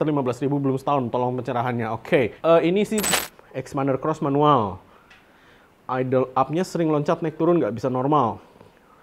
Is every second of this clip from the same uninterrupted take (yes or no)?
no